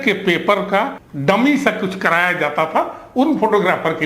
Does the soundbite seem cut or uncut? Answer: cut